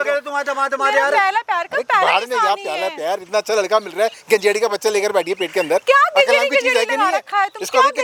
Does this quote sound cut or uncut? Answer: uncut